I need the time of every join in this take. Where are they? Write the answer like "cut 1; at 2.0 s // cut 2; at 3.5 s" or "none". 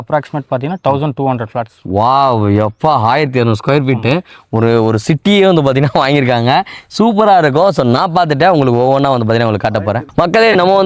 none